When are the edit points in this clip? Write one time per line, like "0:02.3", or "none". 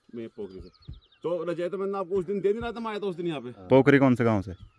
none